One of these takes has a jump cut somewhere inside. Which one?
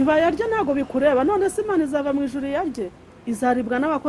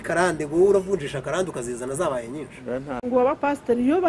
second; 1 cut; at 3.0 s

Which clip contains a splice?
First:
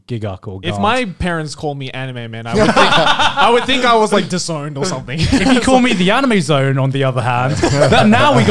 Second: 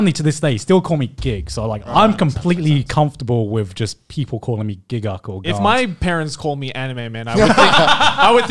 second; 1 cut; at 1.8 s

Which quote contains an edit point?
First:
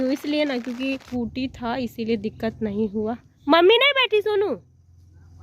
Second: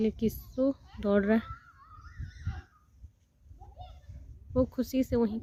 first; 1 cut; at 1.0 s

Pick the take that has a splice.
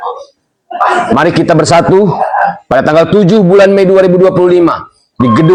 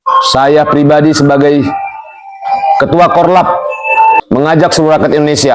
second; 1 cut; at 4.2 s

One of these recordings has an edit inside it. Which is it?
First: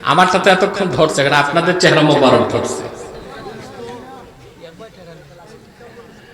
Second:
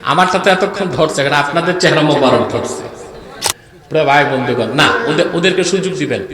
second; 1 cut; at 3.4 s

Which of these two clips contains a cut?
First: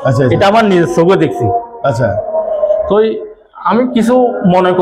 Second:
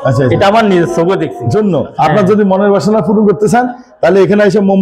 second; 1 cut; at 1.4 s

